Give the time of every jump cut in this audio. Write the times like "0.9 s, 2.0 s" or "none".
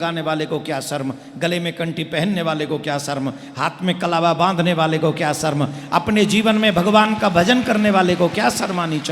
none